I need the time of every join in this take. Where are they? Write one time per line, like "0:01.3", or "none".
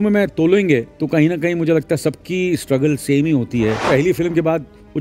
0:00.9
0:03.8